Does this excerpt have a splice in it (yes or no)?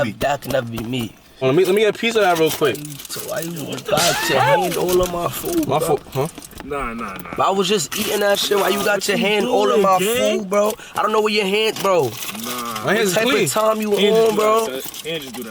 yes